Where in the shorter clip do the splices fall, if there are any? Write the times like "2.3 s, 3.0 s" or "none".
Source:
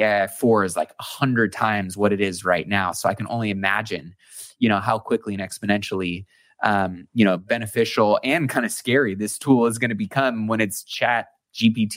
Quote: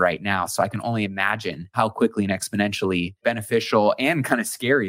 1.7 s, 3.2 s